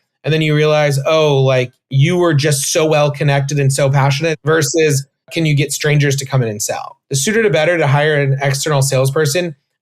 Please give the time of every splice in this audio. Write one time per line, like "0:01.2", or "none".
0:04.3
0:05.3
0:07.0